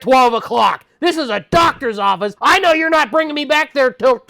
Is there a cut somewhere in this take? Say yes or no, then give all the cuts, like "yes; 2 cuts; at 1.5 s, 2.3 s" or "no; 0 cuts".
yes; 1 cut; at 2.3 s